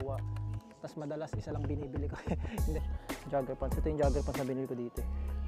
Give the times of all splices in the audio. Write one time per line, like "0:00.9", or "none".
0:02.8

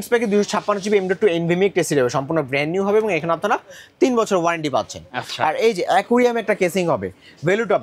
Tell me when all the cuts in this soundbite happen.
none

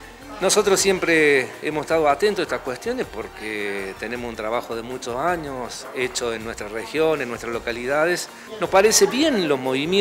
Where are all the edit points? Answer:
0:08.4

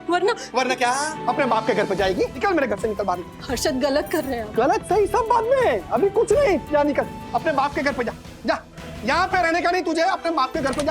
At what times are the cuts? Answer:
0:01.2
0:02.3

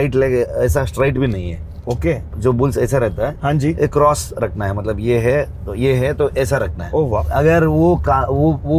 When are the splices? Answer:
0:07.2

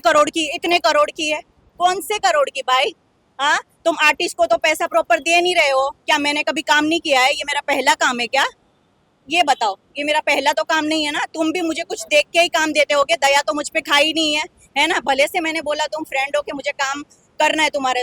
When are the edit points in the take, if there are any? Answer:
none

